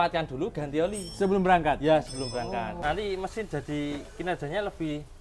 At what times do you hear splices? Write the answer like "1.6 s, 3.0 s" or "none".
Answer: 2.8 s